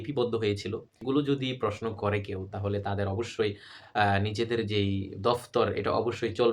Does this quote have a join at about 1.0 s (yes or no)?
yes